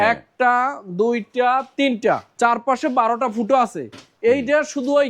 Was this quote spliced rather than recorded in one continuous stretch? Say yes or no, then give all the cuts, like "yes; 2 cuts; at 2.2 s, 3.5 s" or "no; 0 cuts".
yes; 1 cut; at 2.3 s